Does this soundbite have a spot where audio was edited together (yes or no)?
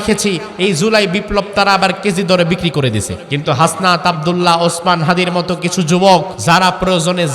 yes